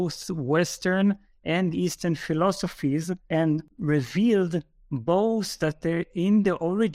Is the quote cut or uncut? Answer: uncut